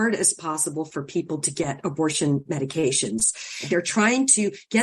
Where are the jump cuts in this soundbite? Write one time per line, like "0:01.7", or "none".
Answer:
0:03.6